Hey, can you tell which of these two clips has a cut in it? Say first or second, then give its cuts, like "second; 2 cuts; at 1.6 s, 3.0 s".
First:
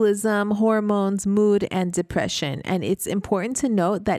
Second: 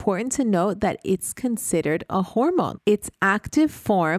second; 1 cut; at 2.7 s